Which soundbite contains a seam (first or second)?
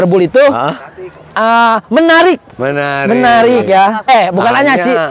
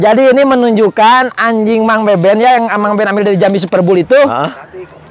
first